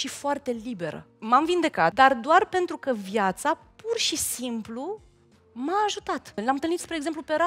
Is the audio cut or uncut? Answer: cut